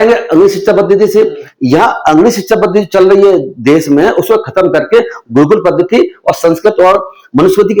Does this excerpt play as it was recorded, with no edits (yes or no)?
yes